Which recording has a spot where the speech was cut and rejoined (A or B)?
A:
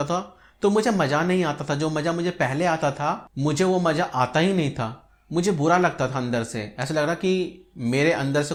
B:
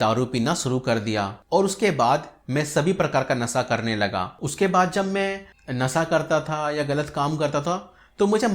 B